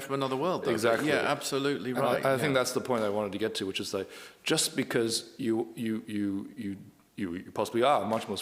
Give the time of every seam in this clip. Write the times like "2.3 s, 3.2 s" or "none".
none

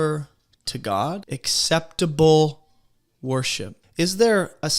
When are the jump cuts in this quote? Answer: 1.2 s, 3.8 s

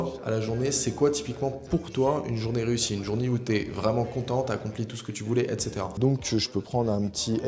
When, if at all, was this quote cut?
5.9 s

